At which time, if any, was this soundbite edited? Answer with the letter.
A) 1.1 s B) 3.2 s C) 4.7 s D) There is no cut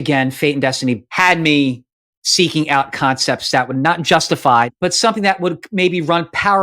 A